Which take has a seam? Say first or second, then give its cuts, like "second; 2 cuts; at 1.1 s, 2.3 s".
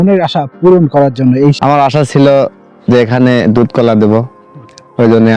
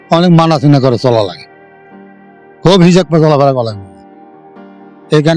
first; 1 cut; at 1.6 s